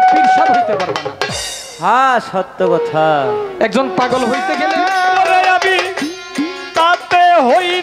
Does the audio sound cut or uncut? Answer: cut